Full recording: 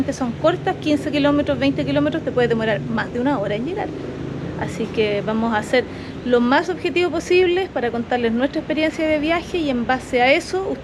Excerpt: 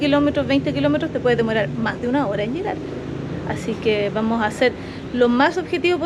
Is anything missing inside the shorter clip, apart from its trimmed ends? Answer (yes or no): no